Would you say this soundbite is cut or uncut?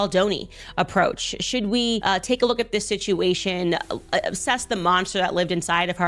cut